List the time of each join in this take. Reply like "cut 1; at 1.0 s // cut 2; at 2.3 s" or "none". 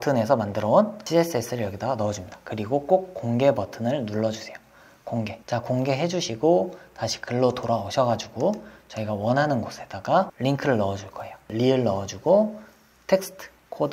cut 1; at 1.0 s // cut 2; at 10.3 s // cut 3; at 11.4 s